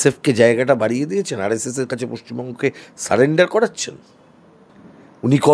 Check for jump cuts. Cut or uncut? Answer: uncut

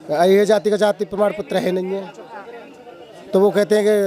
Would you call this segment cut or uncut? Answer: uncut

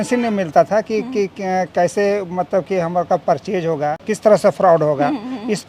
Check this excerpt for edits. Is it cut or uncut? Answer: cut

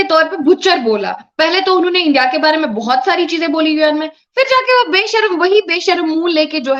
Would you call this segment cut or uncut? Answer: uncut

